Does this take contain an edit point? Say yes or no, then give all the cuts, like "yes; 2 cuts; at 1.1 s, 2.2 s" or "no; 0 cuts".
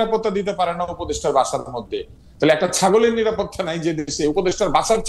yes; 1 cut; at 2.2 s